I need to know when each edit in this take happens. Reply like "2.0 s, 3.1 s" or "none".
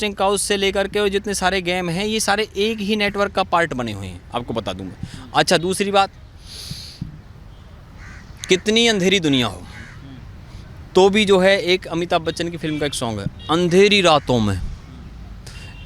none